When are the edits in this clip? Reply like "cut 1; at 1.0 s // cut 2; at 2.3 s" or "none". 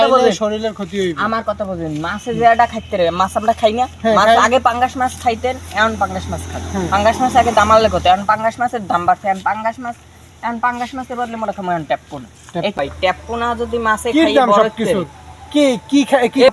cut 1; at 12.7 s